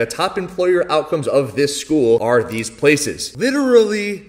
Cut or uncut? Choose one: uncut